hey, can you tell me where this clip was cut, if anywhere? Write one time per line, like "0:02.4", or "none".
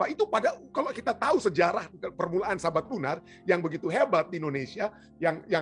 none